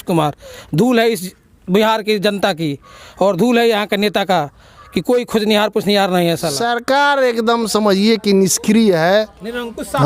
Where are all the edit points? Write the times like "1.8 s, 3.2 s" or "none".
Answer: 6.5 s